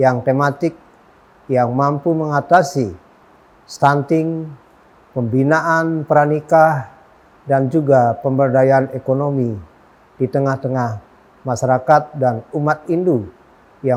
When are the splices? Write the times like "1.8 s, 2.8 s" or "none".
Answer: none